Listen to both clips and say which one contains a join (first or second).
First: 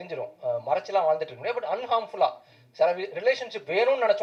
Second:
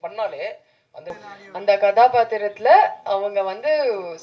second